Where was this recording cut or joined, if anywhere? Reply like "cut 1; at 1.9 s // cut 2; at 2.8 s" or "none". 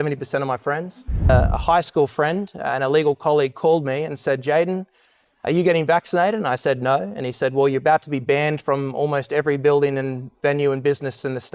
cut 1; at 1.3 s